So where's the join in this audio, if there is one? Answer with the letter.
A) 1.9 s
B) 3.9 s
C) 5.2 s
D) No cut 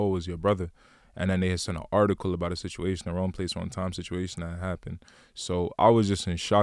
D